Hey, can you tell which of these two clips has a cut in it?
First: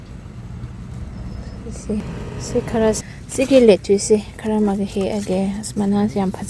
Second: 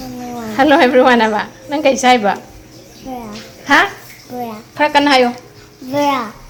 first; 1 cut; at 3.1 s

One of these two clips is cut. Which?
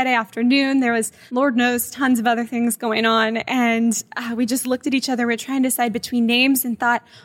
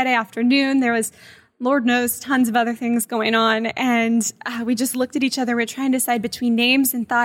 first; 1 cut; at 1.2 s

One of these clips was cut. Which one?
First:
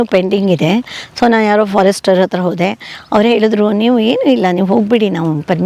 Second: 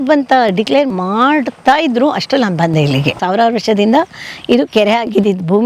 second; 2 cuts; at 0.9 s, 3.2 s

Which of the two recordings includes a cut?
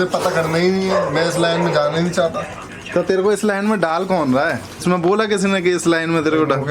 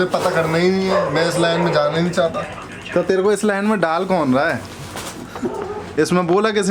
first; 1 cut; at 4.8 s

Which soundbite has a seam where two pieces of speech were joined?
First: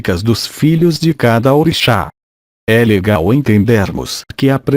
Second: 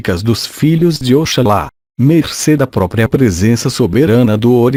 first; 1 cut; at 1.0 s

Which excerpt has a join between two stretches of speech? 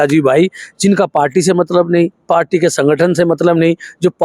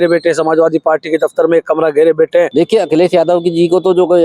second; 1 cut; at 2.5 s

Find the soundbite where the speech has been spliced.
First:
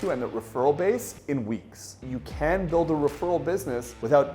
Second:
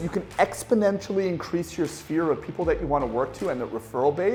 first; 1 cut; at 1.9 s

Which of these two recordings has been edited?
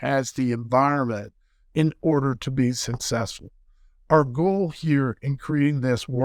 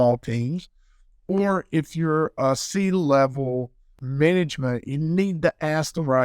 second; 1 cut; at 4.0 s

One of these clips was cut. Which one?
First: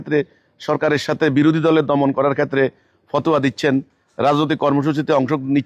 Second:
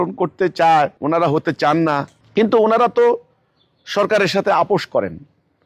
second; 2 cuts; at 1.0 s, 2.2 s

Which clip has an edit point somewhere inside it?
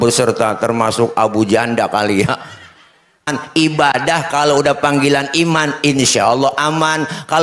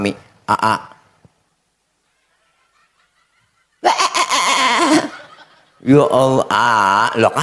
first; 1 cut; at 3.4 s

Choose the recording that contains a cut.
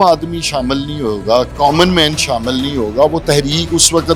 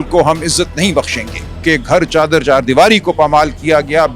second; 1 cut; at 1.6 s

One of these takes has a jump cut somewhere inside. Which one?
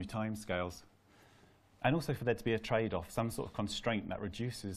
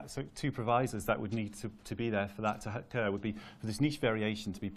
second; 1 cut; at 1.2 s

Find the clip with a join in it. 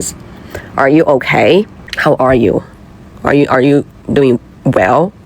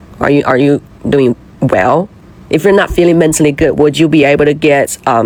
first; 1 cut; at 1.8 s

